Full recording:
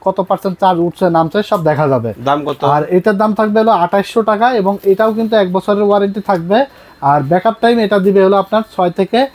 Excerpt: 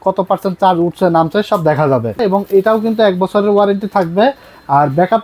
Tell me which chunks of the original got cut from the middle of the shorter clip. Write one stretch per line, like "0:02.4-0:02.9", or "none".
0:02.2-0:04.5